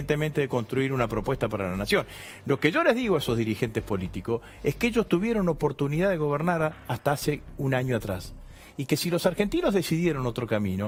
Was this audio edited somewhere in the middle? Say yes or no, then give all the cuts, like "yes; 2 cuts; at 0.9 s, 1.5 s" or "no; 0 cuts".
no; 0 cuts